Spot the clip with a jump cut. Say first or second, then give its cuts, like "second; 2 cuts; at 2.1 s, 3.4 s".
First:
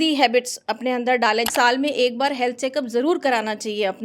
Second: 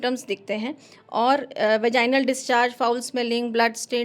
first; 1 cut; at 1.5 s